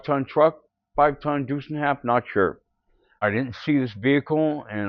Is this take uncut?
no; 1 cut; at 3.0 s

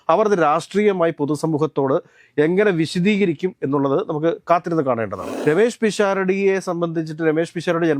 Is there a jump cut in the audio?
yes; 1 cut; at 5.2 s

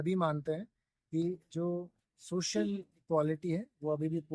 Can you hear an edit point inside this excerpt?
no; 0 cuts

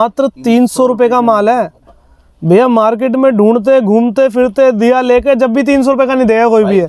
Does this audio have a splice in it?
no; 0 cuts

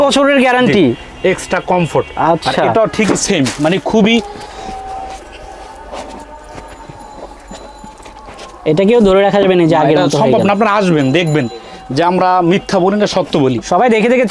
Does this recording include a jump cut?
no; 0 cuts

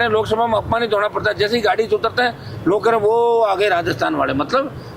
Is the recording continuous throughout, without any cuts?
yes; 0 cuts

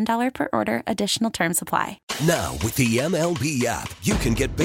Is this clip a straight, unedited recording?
no; 1 cut; at 2.0 s

